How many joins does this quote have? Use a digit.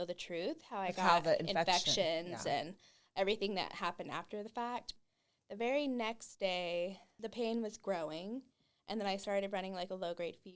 2